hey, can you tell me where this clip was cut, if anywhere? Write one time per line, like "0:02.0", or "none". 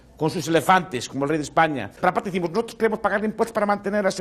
0:01.9